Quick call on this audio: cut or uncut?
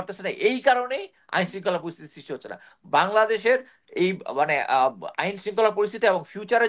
uncut